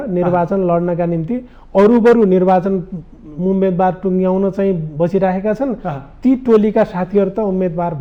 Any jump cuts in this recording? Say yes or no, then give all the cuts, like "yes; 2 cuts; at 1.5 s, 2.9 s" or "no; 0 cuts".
no; 0 cuts